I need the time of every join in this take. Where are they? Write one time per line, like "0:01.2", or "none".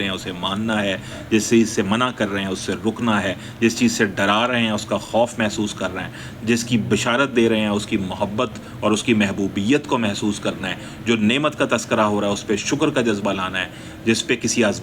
none

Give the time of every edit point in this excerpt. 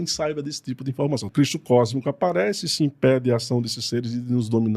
0:01.3

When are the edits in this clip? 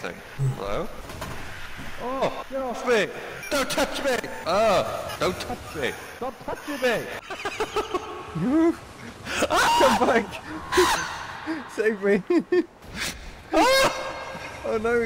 0:01.1
0:02.4
0:07.2

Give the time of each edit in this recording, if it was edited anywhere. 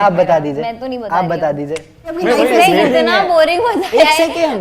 0:02.2

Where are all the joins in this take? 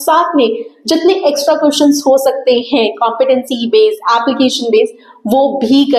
none

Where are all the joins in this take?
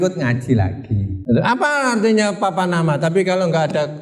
0:01.1

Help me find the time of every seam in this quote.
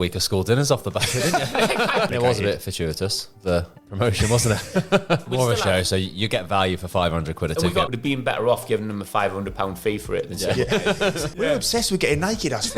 0:02.1
0:05.2
0:07.9
0:11.2

